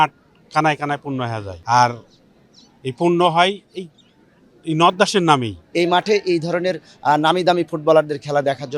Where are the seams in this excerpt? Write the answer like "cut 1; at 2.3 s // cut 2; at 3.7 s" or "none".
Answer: cut 1; at 1.5 s // cut 2; at 5.6 s